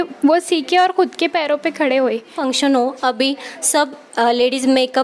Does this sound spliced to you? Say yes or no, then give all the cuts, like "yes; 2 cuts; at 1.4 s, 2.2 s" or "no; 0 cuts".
yes; 1 cut; at 2.4 s